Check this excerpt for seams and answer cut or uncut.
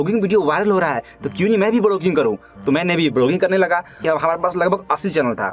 cut